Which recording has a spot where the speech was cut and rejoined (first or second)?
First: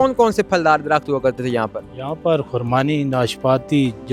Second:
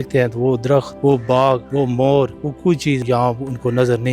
second